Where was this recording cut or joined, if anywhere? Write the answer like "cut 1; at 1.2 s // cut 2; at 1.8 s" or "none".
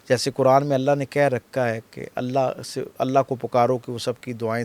none